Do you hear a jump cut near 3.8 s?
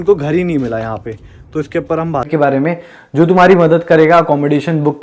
no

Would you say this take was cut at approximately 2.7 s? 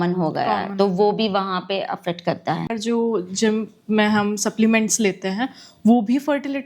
yes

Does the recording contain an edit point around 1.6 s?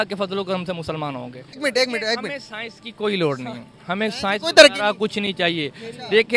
yes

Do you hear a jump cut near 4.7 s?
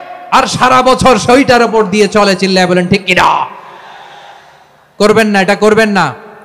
no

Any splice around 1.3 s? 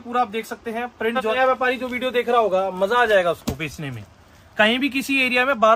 yes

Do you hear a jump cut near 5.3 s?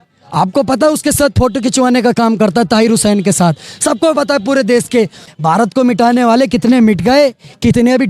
yes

